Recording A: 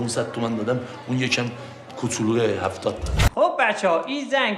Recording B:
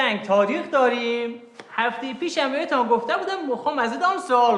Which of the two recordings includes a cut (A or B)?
A